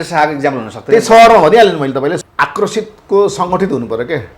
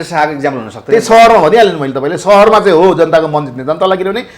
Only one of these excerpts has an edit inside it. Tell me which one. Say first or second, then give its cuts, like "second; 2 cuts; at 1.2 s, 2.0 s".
first; 1 cut; at 2.1 s